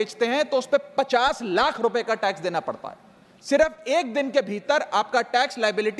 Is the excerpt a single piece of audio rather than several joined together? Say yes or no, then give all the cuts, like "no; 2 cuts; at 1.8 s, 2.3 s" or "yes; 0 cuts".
yes; 0 cuts